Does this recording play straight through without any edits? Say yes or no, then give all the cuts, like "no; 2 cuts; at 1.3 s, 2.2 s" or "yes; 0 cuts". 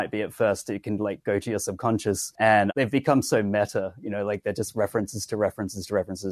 no; 1 cut; at 2.6 s